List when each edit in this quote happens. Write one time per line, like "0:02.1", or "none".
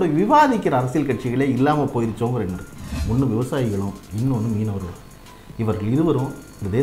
0:02.9